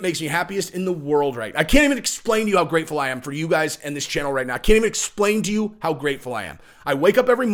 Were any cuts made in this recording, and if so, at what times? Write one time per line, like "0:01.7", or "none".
none